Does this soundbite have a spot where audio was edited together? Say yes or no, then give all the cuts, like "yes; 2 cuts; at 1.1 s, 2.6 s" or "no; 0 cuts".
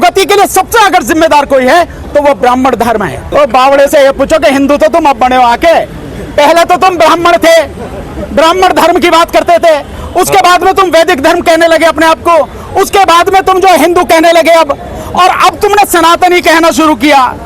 yes; 1 cut; at 3.2 s